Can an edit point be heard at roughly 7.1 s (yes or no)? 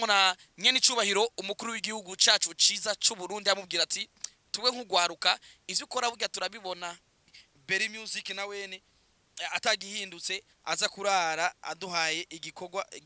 yes